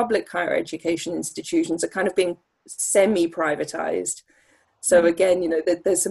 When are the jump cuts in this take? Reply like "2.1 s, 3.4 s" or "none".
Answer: none